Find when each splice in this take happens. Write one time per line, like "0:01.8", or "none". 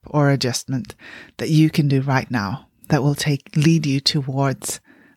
none